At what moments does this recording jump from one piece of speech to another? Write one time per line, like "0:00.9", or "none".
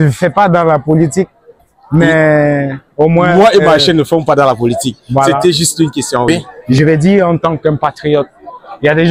0:06.3